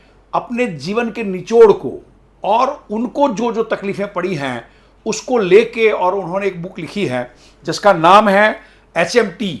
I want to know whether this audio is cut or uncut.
uncut